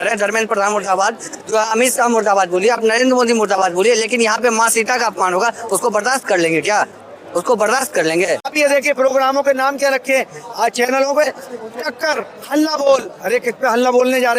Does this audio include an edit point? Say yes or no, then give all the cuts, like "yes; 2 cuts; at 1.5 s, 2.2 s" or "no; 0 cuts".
yes; 1 cut; at 8.5 s